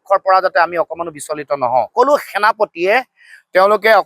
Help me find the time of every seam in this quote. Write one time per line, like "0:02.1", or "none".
0:01.9